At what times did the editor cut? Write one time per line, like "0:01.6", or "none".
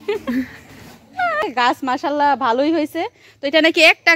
0:01.4